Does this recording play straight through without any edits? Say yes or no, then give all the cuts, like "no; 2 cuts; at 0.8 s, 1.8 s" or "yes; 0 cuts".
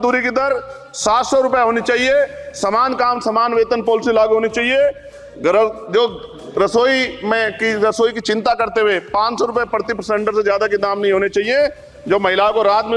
yes; 0 cuts